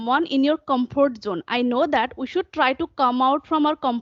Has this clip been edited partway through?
no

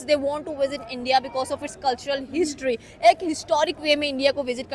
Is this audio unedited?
yes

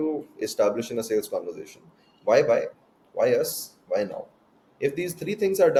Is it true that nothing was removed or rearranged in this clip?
yes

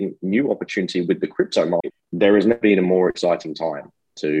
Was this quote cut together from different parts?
yes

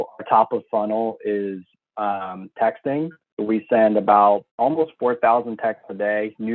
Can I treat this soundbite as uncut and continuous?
no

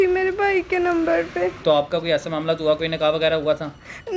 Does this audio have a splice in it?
yes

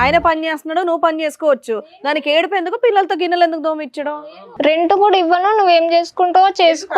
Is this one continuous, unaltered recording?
no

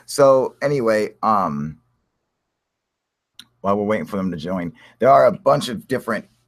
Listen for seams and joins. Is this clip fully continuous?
yes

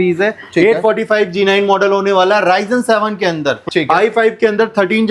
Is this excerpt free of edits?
no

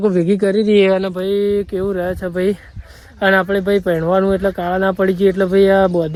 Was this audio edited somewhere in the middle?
no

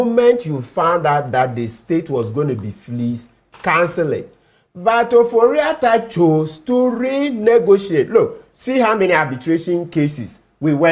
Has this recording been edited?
no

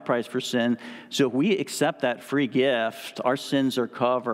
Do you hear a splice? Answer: no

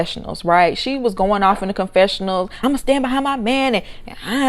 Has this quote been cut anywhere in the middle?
yes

